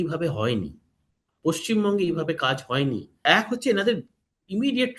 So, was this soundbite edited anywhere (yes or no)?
yes